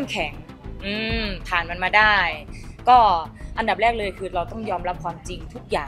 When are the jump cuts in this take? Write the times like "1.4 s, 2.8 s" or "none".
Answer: none